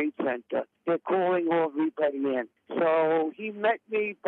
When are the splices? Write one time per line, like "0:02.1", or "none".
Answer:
none